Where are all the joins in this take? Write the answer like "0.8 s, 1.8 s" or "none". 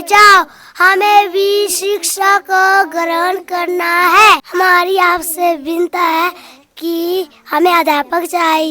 4.5 s